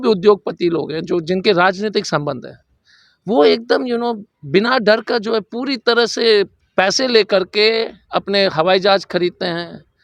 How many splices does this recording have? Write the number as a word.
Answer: two